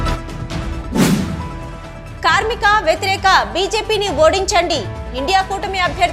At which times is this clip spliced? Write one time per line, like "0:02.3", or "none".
0:01.3